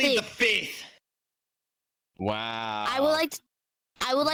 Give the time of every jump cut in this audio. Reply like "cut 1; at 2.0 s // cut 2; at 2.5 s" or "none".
none